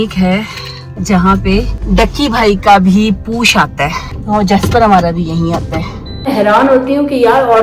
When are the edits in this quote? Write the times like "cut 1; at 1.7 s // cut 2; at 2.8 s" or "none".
cut 1; at 0.9 s // cut 2; at 1.8 s // cut 3; at 4.1 s // cut 4; at 6.3 s